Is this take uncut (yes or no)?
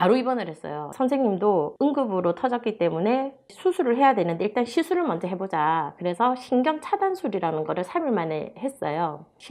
yes